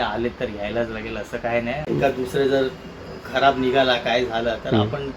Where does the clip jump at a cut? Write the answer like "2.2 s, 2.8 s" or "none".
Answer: 1.8 s

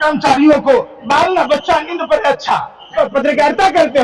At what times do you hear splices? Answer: 2.9 s

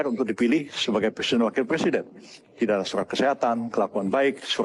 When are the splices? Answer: none

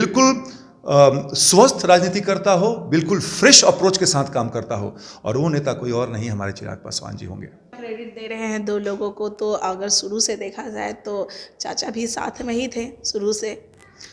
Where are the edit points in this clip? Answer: 7.8 s

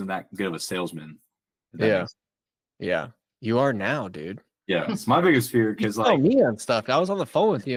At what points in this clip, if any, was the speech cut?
none

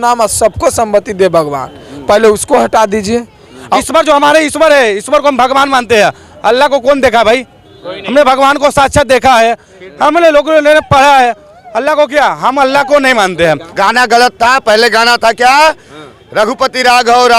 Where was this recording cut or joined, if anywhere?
3.7 s, 13.7 s

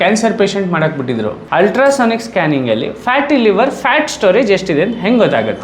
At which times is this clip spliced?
1.4 s

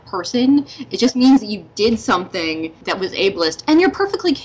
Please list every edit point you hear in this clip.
2.8 s

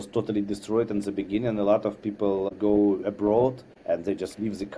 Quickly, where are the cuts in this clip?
2.5 s, 3.7 s

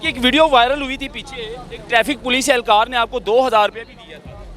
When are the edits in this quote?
none

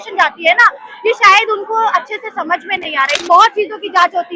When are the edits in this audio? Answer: 3.2 s

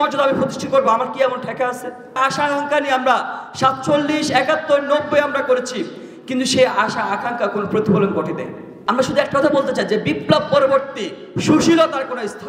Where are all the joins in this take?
2.2 s, 8.8 s

